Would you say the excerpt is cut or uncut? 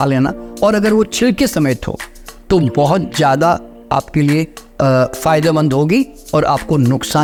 uncut